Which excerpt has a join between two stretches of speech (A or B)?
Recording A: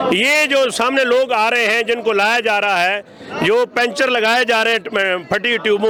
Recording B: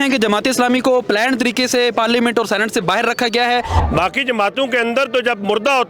B